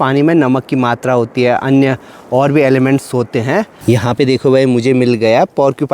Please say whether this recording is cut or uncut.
cut